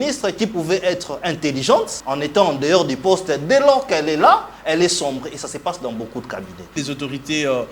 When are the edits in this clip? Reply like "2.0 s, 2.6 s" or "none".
2.0 s, 6.8 s